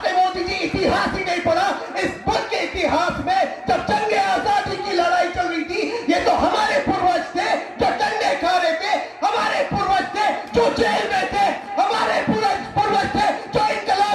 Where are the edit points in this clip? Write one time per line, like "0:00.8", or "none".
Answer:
none